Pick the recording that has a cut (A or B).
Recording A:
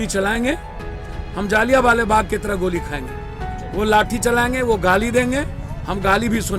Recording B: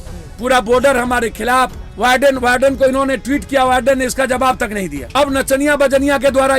B